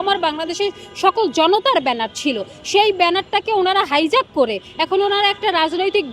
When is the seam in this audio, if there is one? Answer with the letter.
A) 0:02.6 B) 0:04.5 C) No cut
C